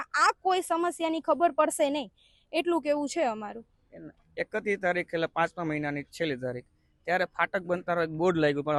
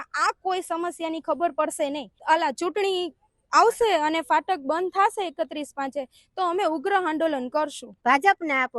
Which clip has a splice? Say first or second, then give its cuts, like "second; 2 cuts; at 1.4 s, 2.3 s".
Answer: second; 2 cuts; at 2.1 s, 7.9 s